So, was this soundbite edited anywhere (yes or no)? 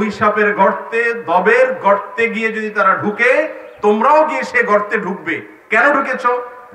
no